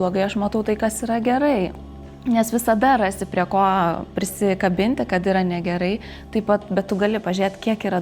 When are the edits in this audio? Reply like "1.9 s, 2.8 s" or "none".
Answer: none